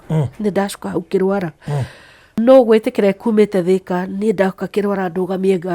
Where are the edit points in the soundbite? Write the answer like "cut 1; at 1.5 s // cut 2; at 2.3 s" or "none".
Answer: cut 1; at 2.4 s